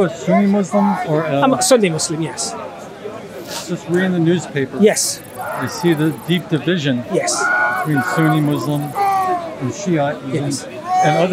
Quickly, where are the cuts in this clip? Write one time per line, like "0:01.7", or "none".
none